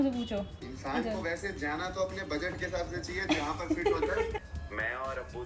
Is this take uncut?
no; 1 cut; at 4.4 s

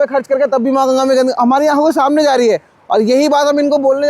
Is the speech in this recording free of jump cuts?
yes; 0 cuts

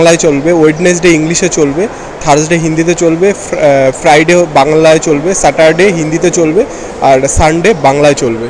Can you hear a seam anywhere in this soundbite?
no; 0 cuts

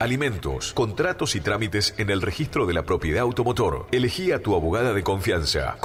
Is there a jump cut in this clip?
no; 0 cuts

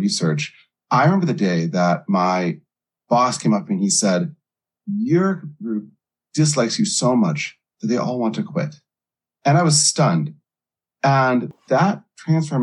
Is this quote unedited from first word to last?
no; 1 cut; at 11.5 s

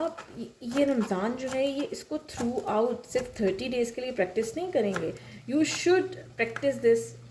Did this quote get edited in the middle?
no; 0 cuts

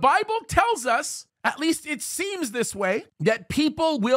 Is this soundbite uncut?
no; 1 cut; at 3.1 s

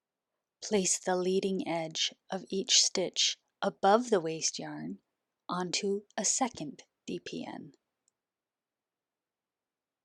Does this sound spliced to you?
no; 0 cuts

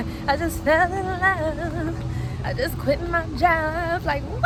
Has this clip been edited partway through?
no; 0 cuts

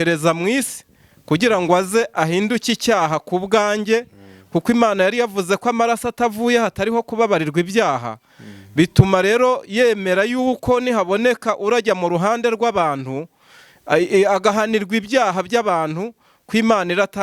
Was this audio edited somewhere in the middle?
no; 0 cuts

